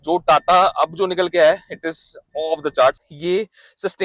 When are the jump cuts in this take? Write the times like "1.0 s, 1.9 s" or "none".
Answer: 3.1 s